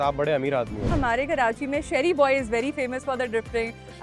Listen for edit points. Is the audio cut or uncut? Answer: cut